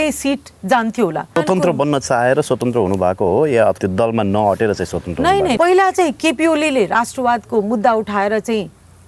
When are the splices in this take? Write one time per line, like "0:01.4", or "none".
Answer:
0:01.3
0:03.8
0:05.6